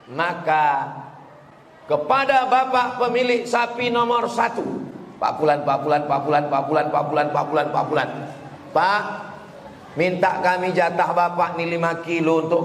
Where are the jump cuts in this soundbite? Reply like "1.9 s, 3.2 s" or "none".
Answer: none